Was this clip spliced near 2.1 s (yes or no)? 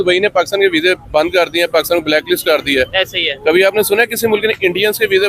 no